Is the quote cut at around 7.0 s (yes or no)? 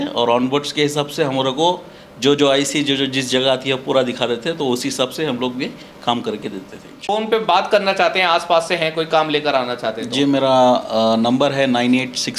yes